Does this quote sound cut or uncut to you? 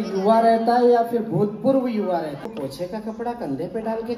cut